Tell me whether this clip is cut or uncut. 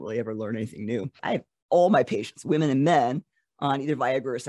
cut